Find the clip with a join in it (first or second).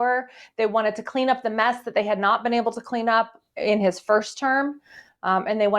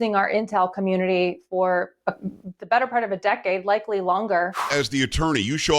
second